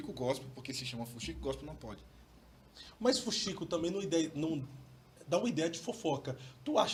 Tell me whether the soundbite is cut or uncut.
uncut